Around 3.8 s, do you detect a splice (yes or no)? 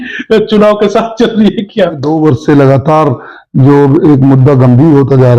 no